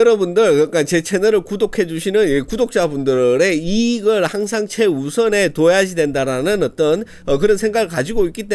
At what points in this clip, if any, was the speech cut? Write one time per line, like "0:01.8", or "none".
none